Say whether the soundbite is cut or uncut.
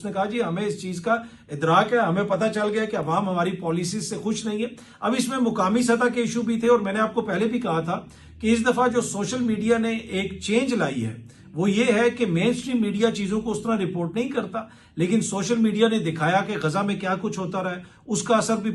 uncut